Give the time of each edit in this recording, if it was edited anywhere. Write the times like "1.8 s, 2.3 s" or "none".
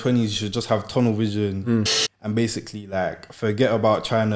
2.0 s